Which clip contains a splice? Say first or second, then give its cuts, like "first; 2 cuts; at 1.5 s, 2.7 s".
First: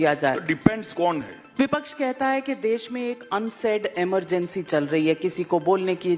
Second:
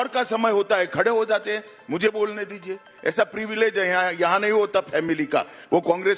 first; 1 cut; at 1.4 s